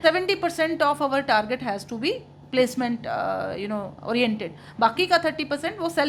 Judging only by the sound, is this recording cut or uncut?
uncut